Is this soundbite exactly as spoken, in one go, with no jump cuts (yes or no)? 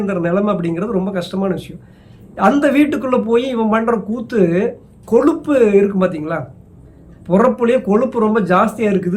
yes